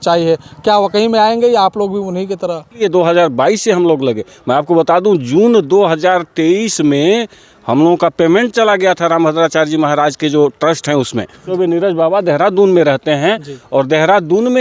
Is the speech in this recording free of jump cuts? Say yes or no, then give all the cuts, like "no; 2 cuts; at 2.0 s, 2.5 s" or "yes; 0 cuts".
no; 2 cuts; at 2.8 s, 11.5 s